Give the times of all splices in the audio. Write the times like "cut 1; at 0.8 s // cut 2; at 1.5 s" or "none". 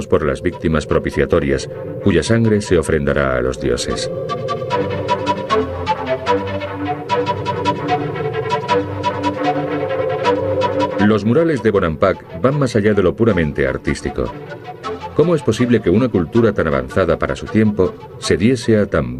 none